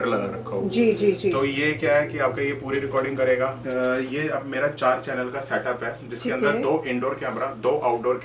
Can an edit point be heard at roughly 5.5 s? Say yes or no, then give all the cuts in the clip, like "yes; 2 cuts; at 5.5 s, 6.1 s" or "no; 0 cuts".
no; 1 cut; at 3.6 s